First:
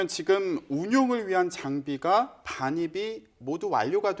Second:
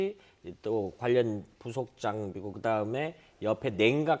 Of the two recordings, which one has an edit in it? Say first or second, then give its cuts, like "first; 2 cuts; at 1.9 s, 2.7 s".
first; 1 cut; at 2.9 s